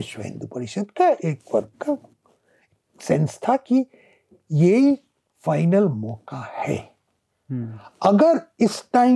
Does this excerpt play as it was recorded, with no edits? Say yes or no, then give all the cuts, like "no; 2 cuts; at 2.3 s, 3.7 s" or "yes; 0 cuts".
yes; 0 cuts